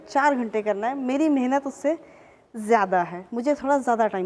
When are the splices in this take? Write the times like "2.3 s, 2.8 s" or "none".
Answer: none